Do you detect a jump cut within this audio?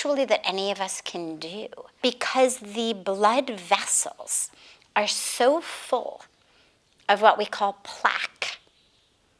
yes; 1 cut; at 2.0 s

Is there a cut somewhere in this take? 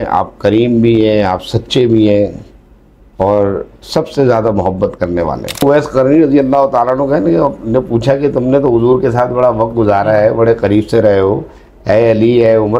yes; 1 cut; at 5.6 s

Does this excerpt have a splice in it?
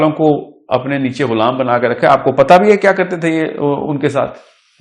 no; 0 cuts

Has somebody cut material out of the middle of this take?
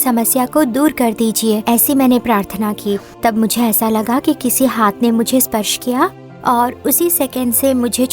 no; 0 cuts

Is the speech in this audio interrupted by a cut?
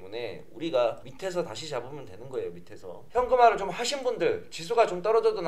yes; 2 cuts; at 1.0 s, 3.0 s

